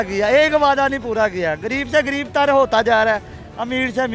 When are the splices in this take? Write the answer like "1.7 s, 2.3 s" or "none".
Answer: none